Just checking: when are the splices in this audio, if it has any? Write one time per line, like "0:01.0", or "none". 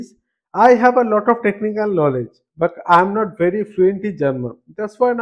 none